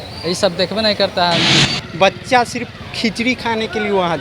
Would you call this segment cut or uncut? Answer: cut